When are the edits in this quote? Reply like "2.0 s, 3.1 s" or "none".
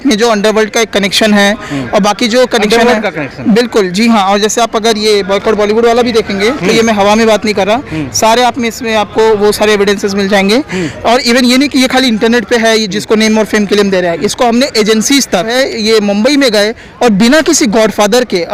15.5 s